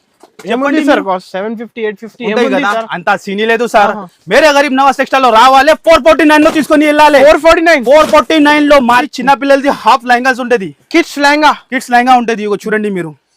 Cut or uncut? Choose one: cut